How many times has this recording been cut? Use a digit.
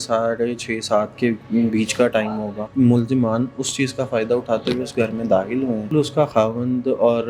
2